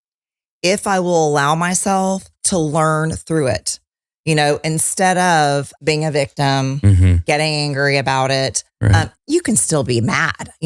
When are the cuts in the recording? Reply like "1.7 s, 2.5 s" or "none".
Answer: 5.7 s